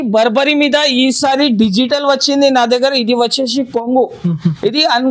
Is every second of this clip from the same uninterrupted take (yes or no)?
yes